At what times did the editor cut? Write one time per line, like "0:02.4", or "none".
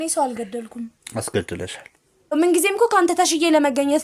0:02.4